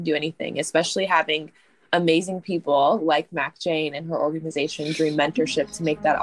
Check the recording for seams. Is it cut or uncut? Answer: uncut